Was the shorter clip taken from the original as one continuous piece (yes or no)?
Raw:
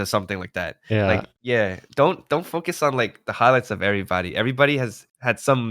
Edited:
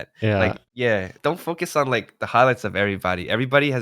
no